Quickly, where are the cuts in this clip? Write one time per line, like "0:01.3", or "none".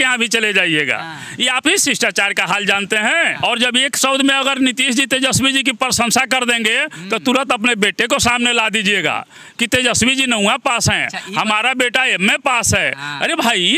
0:03.3

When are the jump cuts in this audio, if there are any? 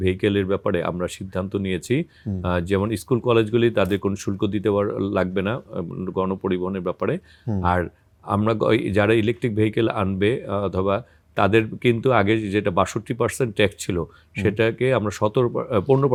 none

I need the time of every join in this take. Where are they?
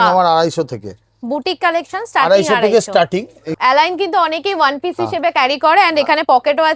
0:03.5

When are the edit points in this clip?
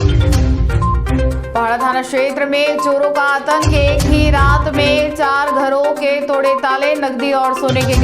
0:01.1

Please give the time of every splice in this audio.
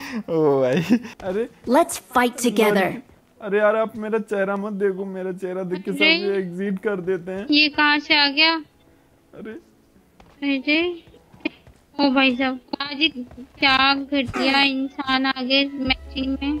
0:01.2

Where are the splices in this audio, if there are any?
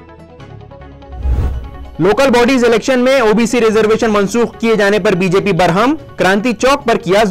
0:01.4

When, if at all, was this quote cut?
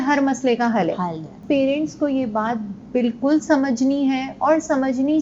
0:01.3

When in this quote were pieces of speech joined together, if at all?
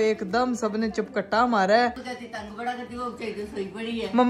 none

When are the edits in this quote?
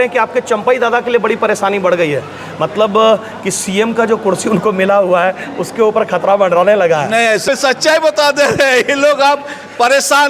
0:07.4

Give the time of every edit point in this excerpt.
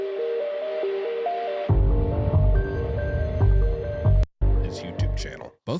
0:04.3

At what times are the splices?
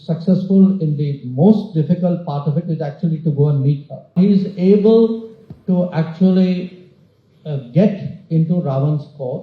0:04.1

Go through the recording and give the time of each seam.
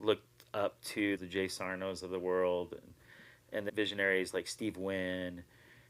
0:01.2
0:03.7

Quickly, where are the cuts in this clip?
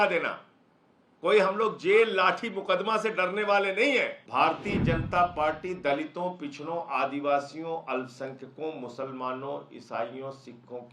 0:04.2

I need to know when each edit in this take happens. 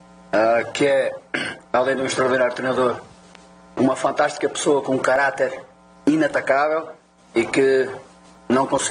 none

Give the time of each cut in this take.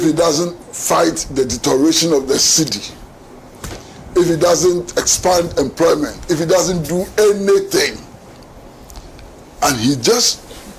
none

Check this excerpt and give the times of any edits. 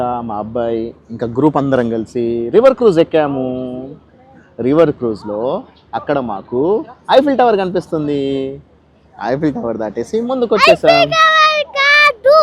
none

